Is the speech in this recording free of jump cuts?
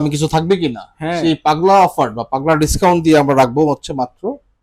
yes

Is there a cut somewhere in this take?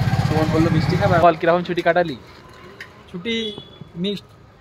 yes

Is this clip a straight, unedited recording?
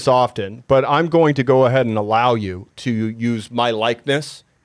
yes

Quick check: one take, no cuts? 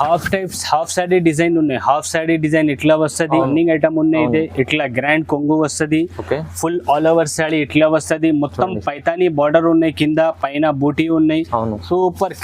no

